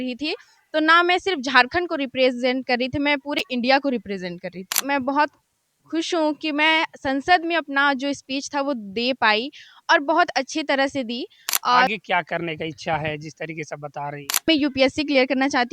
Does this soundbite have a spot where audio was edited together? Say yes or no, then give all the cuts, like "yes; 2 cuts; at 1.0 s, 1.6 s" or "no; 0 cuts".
yes; 3 cuts; at 4.8 s, 11.9 s, 14.5 s